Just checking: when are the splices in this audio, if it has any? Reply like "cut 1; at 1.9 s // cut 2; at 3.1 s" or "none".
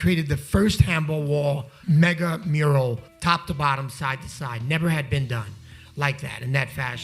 cut 1; at 1.7 s // cut 2; at 3.1 s